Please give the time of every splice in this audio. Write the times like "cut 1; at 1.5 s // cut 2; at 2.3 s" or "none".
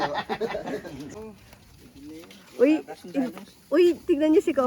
cut 1; at 1.1 s